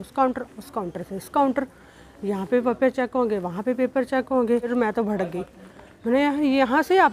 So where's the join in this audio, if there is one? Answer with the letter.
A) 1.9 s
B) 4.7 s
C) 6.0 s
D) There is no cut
B